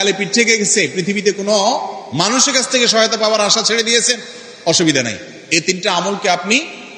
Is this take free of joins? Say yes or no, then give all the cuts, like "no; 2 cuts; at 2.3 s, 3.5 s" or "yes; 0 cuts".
yes; 0 cuts